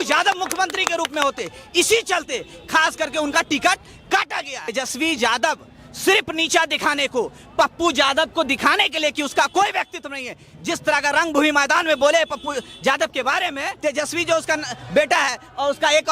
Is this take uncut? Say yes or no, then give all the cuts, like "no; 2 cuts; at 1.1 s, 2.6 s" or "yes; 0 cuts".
no; 2 cuts; at 4.7 s, 13.7 s